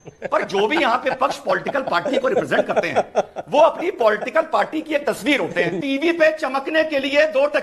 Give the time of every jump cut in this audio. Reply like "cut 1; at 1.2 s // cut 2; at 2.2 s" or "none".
cut 1; at 5.8 s